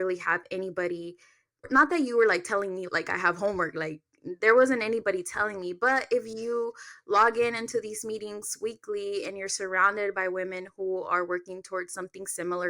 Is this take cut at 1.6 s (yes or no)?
yes